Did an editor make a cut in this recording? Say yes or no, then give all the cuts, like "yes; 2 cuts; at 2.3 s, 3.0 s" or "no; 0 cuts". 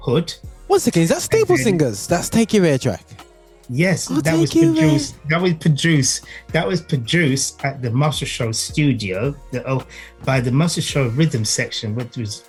no; 0 cuts